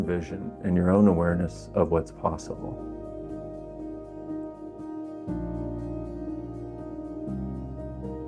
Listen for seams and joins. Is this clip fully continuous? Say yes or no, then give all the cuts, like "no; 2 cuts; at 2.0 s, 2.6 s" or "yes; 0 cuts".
no; 1 cut; at 2.6 s